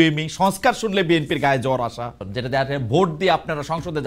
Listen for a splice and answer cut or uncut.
cut